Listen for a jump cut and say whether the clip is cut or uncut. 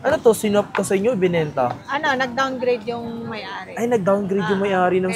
uncut